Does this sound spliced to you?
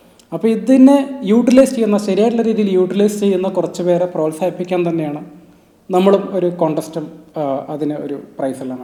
no; 0 cuts

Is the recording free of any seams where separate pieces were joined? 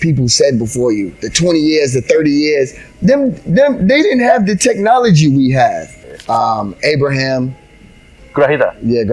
no; 1 cut; at 5.9 s

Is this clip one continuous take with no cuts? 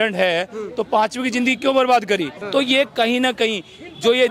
no; 1 cut; at 2.4 s

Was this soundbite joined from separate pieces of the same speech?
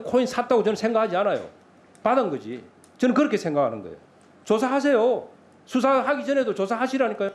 no; 0 cuts

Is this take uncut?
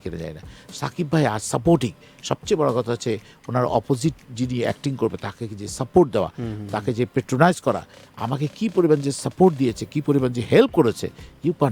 yes; 0 cuts

